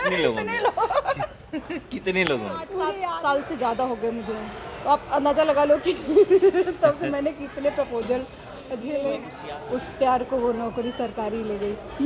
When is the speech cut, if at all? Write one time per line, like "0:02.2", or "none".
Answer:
0:02.8
0:09.3